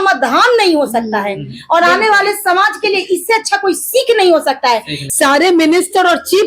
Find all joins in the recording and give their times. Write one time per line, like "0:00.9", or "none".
0:05.0